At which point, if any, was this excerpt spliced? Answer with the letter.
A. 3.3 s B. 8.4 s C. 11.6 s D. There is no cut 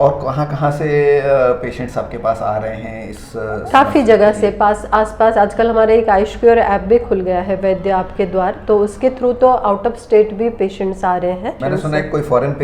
C